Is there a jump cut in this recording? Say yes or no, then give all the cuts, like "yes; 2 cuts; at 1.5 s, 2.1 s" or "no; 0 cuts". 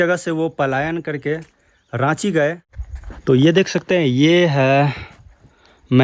no; 0 cuts